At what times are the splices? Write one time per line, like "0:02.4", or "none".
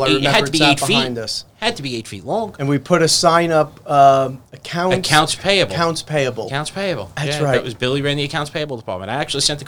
none